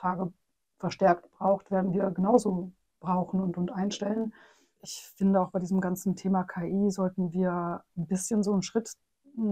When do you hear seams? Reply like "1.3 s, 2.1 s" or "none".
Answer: 4.8 s